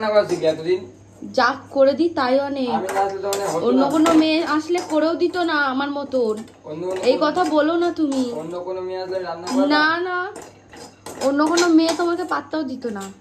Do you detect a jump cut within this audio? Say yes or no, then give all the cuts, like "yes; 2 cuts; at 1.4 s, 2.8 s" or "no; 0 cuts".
no; 0 cuts